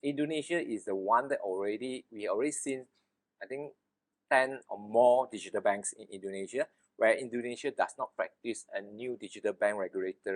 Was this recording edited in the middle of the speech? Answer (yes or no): no